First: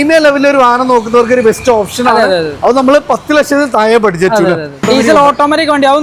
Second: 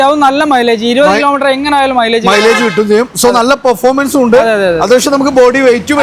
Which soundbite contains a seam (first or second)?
first